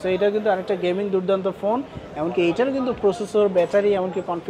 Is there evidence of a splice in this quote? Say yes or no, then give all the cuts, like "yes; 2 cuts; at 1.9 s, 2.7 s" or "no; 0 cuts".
no; 0 cuts